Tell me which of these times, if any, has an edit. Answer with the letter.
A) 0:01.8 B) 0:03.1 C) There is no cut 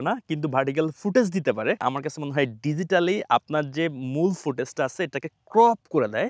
C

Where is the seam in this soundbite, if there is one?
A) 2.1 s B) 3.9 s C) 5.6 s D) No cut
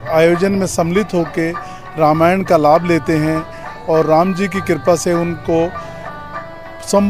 D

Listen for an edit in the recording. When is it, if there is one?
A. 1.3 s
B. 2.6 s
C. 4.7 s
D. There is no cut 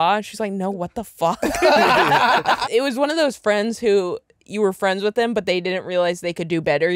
B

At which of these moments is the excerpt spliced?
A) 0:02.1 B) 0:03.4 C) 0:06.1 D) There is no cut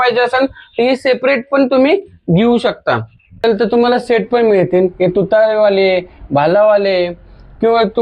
B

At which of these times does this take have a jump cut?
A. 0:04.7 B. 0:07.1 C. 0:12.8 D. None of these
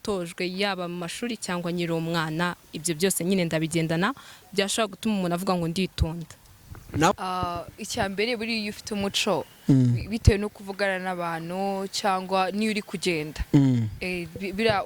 B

